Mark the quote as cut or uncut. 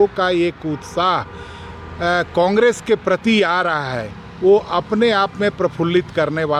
uncut